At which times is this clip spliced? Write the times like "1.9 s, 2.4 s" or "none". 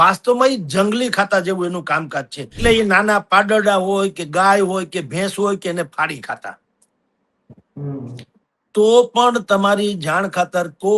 2.6 s